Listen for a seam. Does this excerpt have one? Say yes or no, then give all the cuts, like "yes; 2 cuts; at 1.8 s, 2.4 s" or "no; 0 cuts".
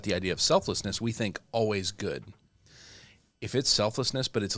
no; 0 cuts